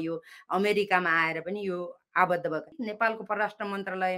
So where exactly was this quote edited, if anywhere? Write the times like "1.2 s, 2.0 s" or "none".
2.8 s